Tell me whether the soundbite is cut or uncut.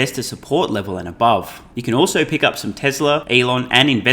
cut